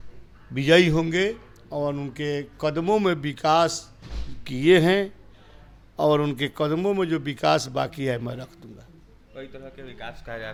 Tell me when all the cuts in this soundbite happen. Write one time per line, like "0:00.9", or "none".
none